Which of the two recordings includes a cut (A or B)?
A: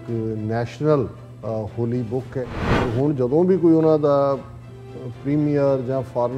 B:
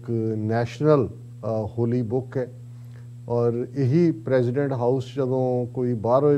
A